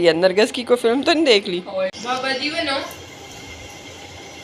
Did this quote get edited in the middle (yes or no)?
yes